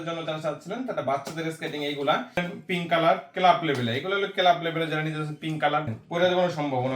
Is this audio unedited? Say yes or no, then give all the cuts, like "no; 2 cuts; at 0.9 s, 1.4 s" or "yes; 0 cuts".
no; 2 cuts; at 2.4 s, 5.9 s